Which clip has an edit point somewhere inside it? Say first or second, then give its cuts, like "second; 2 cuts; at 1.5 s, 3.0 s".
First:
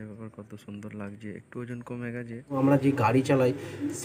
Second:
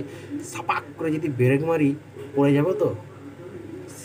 first; 1 cut; at 2.6 s